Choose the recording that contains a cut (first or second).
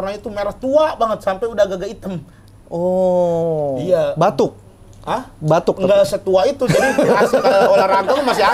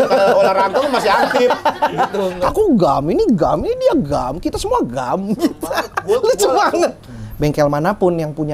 second